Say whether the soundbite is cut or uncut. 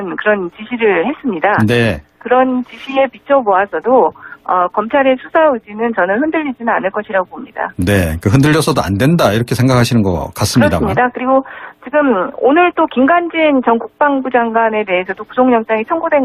cut